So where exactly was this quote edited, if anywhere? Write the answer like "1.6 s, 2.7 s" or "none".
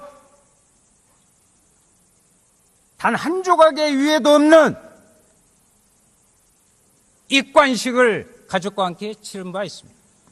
3.9 s

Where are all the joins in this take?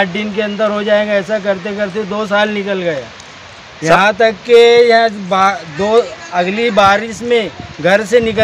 none

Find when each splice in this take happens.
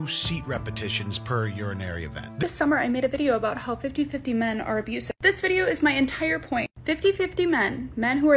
2.4 s, 5.2 s

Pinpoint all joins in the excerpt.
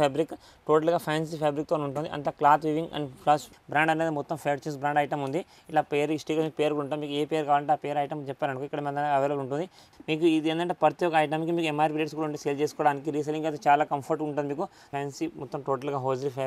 3.6 s, 9.8 s, 14.9 s

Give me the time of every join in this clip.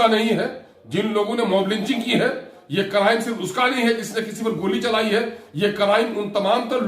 none

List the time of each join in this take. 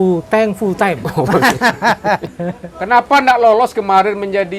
2.3 s

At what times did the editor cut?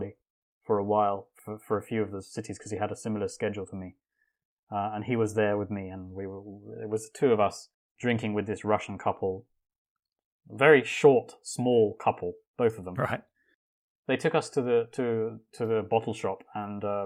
none

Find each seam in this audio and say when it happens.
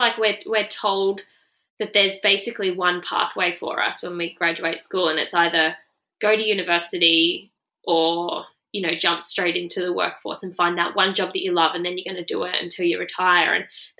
none

